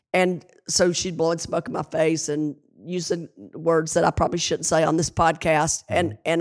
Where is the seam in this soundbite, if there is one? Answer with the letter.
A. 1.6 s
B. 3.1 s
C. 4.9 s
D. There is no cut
D